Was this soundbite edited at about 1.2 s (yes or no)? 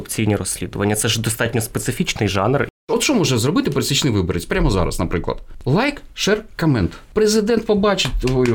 no